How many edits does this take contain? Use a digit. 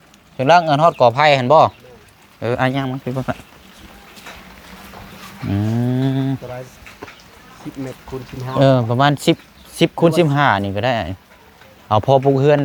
0